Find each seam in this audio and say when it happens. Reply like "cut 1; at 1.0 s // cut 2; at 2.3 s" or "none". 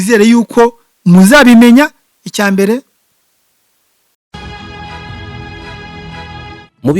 cut 1; at 4.3 s